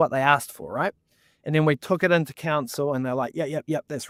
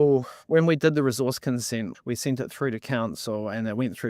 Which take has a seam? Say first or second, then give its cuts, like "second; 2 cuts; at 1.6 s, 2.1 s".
second; 1 cut; at 1.9 s